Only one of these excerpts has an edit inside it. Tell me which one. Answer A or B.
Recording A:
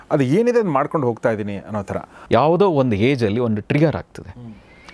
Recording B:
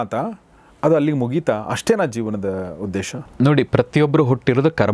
A